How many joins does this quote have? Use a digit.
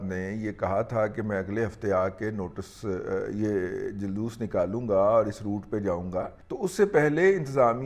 1